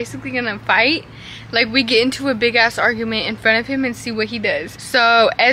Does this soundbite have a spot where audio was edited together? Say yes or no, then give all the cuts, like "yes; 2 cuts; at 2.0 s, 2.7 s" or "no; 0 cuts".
no; 0 cuts